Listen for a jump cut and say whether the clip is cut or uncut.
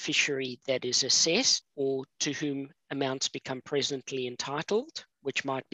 cut